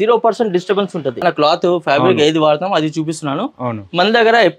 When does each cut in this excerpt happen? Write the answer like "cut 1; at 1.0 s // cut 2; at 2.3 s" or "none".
cut 1; at 1.2 s